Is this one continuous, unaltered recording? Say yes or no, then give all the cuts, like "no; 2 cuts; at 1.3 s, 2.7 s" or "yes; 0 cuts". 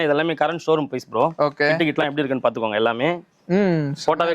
yes; 0 cuts